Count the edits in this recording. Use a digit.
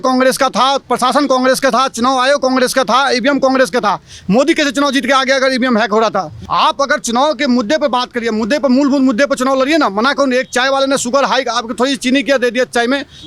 1